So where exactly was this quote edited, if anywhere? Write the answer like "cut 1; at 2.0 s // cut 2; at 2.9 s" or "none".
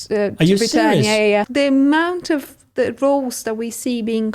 cut 1; at 1.5 s